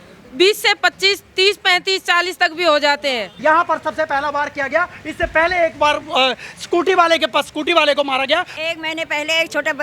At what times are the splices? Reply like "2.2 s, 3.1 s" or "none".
3.3 s, 8.6 s